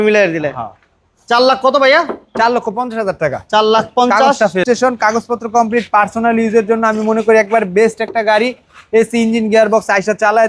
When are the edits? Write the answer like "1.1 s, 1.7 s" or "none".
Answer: 4.6 s